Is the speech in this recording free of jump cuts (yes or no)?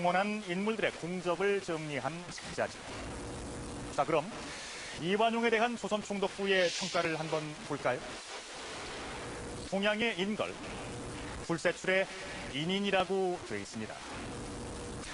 yes